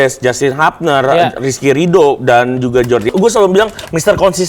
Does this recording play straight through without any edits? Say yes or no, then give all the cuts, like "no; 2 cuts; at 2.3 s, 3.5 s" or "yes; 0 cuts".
no; 1 cut; at 3.1 s